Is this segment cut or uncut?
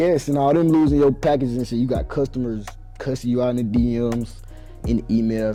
uncut